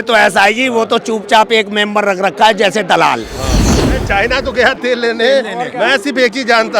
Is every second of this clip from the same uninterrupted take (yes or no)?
no